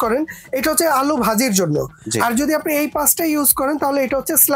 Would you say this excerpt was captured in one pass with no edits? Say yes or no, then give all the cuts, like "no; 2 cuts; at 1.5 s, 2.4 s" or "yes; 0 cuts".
yes; 0 cuts